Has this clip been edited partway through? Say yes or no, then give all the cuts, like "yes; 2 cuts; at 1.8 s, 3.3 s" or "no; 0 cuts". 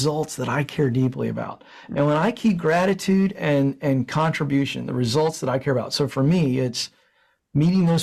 no; 0 cuts